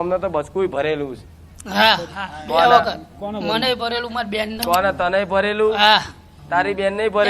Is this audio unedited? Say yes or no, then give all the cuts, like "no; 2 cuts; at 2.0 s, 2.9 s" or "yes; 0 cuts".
no; 1 cut; at 4.6 s